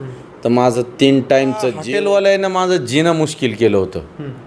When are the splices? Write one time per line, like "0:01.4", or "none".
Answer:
0:01.8